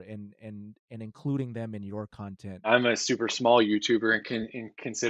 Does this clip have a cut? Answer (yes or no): yes